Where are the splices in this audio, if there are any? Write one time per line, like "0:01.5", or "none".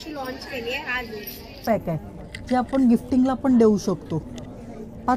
0:01.6